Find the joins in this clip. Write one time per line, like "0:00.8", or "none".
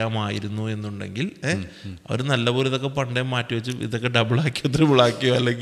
none